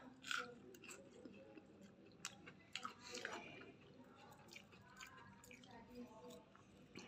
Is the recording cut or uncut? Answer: uncut